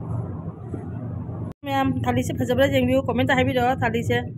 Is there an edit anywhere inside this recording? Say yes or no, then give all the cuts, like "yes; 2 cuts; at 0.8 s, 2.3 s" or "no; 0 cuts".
yes; 1 cut; at 1.5 s